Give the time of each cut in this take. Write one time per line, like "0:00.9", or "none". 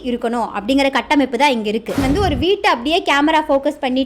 0:02.0